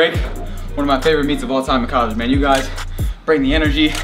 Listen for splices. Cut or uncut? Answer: uncut